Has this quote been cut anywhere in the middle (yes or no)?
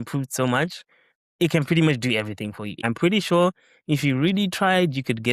yes